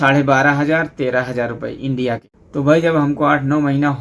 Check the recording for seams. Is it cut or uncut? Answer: uncut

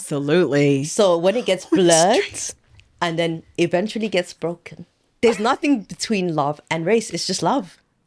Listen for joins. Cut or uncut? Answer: uncut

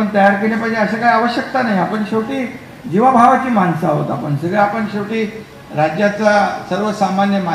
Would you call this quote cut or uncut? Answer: uncut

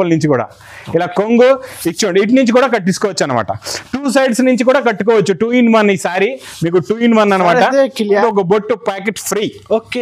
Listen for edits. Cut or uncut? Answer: cut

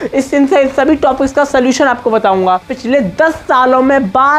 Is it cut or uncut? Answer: cut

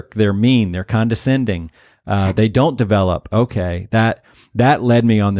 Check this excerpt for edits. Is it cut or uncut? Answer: uncut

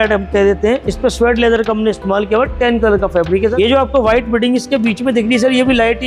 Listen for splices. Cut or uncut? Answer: cut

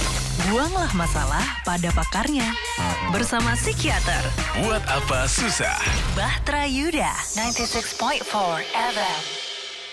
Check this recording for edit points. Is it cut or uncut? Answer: uncut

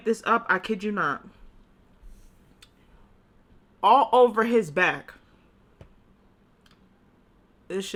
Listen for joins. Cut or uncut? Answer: uncut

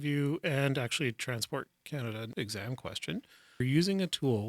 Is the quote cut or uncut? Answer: cut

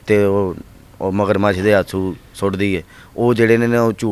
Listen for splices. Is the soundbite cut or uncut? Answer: uncut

